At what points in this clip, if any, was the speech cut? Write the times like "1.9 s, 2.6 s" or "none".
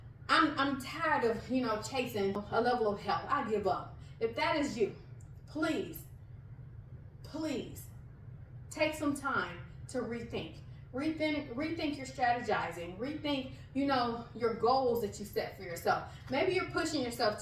2.4 s